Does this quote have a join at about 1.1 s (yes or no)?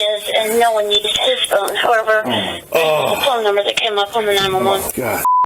no